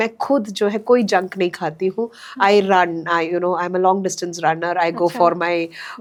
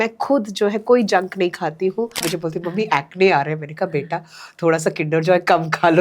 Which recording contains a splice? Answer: second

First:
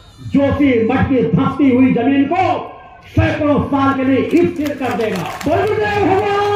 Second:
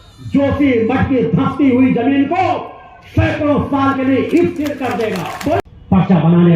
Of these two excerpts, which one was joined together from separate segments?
second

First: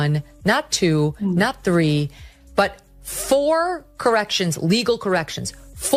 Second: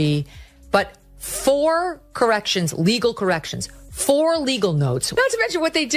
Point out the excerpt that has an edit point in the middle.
second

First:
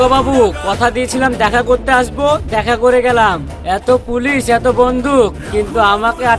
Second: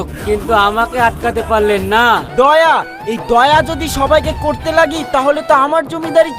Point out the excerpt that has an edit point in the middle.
second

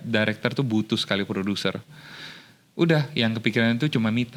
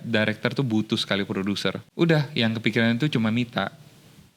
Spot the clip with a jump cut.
second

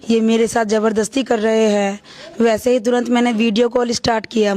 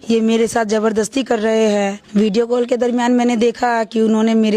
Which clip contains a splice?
second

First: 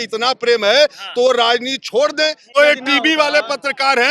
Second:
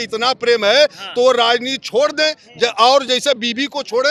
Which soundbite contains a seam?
first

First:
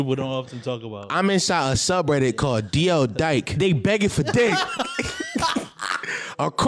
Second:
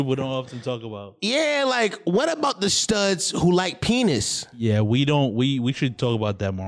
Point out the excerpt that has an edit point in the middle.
first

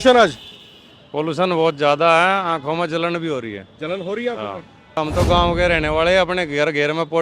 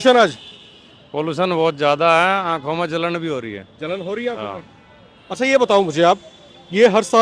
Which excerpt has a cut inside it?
first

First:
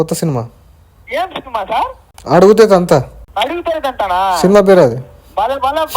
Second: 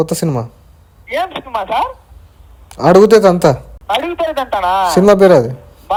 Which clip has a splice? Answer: first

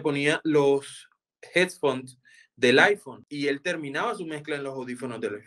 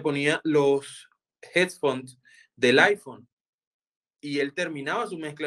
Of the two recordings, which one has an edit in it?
first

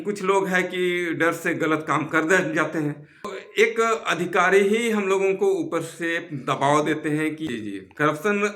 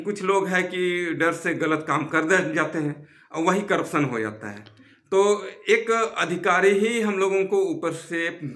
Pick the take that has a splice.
first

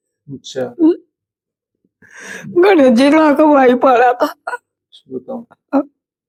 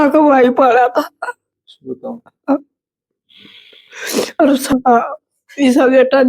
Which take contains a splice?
second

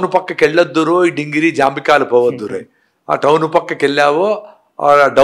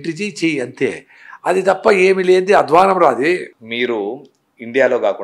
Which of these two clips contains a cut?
second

